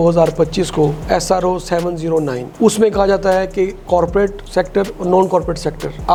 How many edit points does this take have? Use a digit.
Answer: 0